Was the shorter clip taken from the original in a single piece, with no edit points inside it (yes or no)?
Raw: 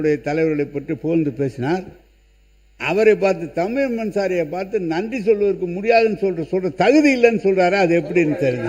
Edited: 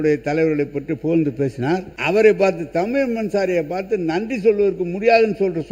no